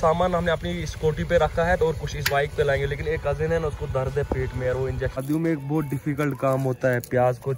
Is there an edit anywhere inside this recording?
yes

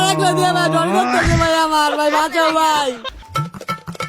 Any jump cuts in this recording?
yes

